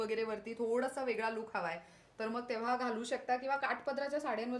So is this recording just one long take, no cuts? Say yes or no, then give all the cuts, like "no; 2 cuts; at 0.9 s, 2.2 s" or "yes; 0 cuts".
yes; 0 cuts